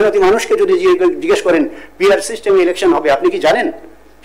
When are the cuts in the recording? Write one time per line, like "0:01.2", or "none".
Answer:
none